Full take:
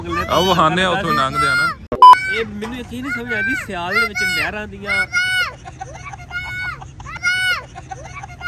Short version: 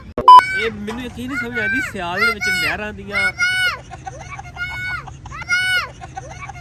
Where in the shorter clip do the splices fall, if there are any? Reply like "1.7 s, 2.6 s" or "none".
none